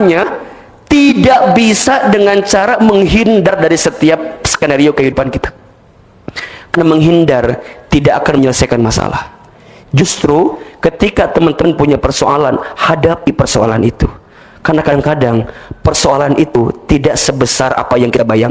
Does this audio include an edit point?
no; 0 cuts

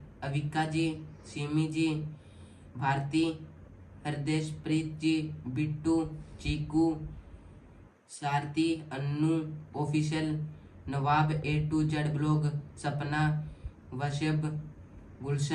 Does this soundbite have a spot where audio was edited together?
no; 0 cuts

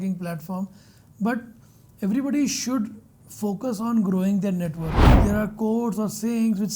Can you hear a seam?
yes; 1 cut; at 5.0 s

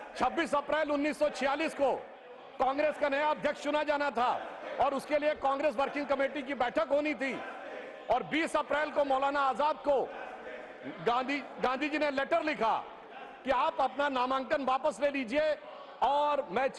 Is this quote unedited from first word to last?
yes; 0 cuts

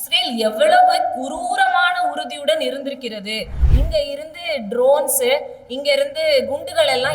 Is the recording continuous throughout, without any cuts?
no; 1 cut; at 3.6 s

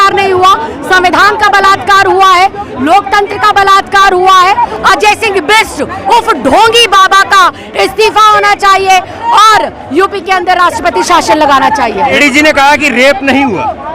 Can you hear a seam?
yes; 2 cuts; at 4.7 s, 12.2 s

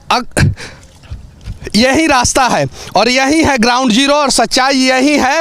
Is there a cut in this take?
no; 0 cuts

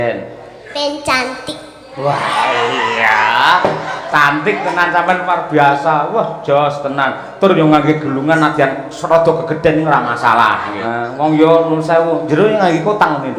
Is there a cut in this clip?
yes; 1 cut; at 10.8 s

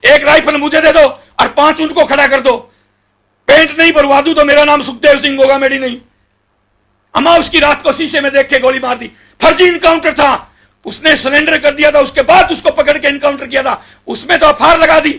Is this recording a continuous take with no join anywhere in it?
yes; 0 cuts

